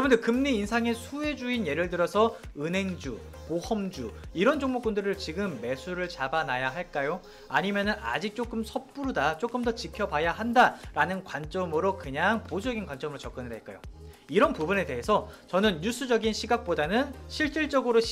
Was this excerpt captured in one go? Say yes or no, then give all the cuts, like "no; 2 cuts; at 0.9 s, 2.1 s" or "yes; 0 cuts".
yes; 0 cuts